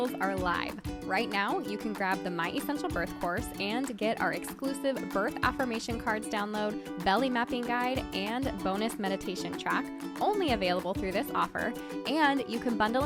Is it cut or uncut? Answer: uncut